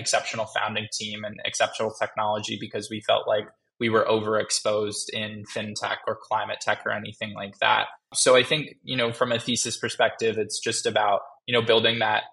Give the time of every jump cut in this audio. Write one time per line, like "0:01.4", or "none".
0:08.1